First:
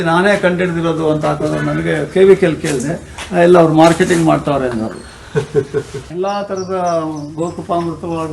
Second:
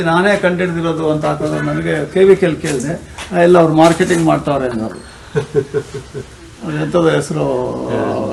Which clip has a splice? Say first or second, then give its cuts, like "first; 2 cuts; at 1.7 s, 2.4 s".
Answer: first; 1 cut; at 6.0 s